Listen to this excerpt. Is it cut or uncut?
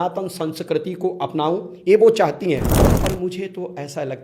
cut